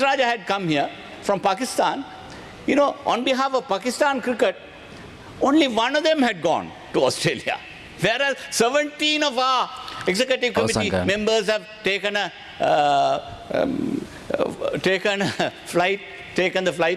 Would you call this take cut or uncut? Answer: uncut